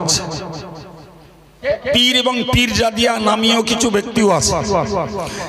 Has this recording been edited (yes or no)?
yes